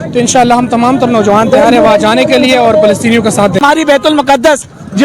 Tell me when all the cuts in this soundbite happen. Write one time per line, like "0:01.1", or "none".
0:03.6